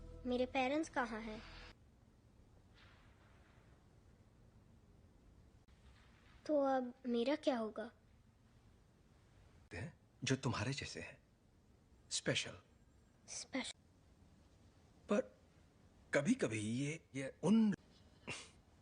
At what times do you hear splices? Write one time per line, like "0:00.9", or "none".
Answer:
0:01.8